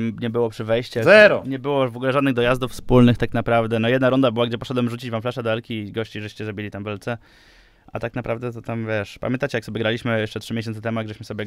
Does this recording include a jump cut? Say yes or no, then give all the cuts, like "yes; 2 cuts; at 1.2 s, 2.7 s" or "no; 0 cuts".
no; 0 cuts